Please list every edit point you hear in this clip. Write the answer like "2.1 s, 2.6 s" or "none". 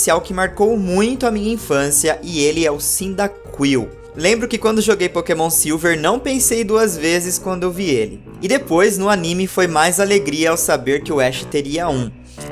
2.2 s